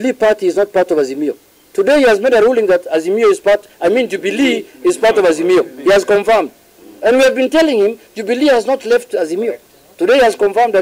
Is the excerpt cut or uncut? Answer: uncut